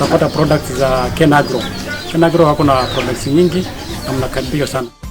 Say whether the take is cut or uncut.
uncut